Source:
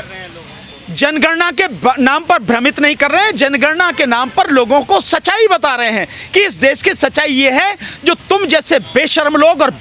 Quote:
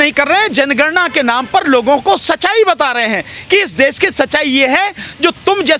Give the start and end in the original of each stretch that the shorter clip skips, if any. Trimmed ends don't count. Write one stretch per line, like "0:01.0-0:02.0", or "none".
none